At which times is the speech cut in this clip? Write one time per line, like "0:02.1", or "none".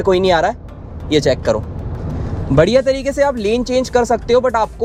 none